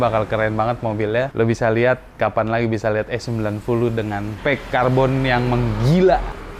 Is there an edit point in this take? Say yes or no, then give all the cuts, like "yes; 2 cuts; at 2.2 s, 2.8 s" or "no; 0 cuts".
no; 0 cuts